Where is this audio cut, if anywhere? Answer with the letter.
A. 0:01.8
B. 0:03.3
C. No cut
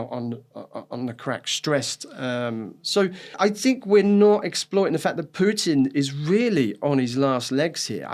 B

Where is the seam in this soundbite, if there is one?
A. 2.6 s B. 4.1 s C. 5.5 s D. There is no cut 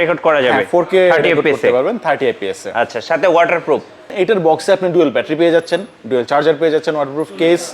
B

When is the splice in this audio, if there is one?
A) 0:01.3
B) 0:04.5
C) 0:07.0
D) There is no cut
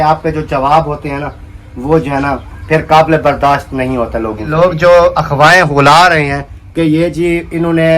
B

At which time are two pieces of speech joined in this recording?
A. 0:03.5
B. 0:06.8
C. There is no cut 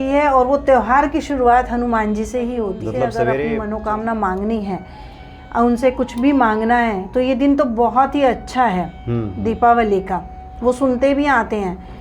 A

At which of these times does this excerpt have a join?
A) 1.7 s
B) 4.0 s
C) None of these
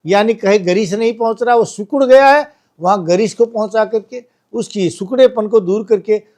C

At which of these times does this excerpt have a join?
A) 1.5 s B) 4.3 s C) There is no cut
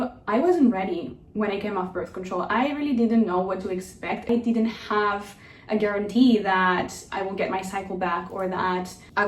B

